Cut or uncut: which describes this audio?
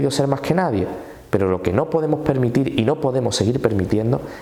uncut